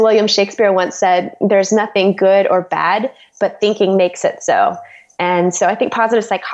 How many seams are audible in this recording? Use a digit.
0